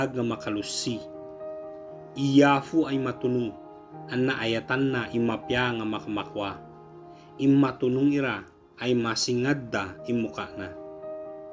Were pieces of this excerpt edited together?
no; 0 cuts

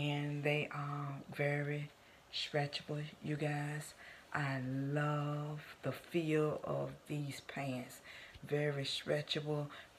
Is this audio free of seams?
yes; 0 cuts

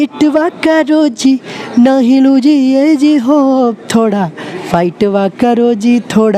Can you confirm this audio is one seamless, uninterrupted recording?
yes; 0 cuts

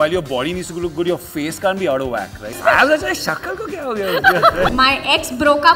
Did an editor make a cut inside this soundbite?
yes; 2 cuts; at 2.5 s, 4.7 s

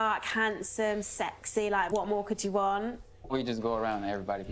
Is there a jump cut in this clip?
yes; 1 cut; at 3.4 s

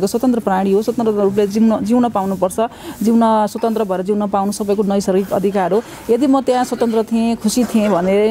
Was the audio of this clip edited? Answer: no; 0 cuts

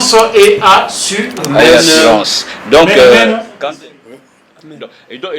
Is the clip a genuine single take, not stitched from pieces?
no; 1 cut; at 3.5 s

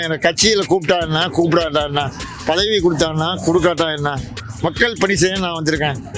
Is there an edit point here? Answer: no; 0 cuts

